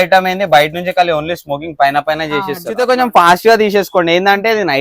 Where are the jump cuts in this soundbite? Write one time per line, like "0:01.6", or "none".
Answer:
0:02.7